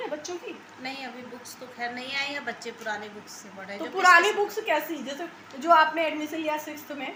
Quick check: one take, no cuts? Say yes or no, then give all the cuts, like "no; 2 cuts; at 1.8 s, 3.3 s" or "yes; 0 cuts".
yes; 0 cuts